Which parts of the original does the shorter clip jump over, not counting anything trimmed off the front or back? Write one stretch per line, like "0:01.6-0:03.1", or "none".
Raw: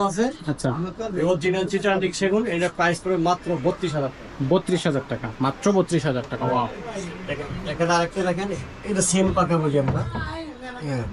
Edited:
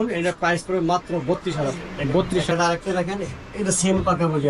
0:04.8-0:07.8